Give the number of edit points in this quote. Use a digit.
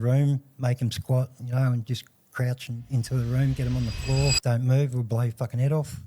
1